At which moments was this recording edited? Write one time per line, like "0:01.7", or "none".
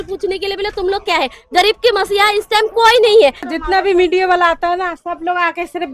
0:03.5